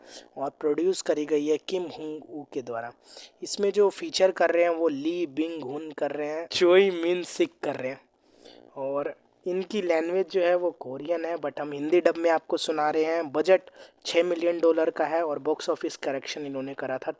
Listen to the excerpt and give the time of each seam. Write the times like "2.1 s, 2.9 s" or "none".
6.5 s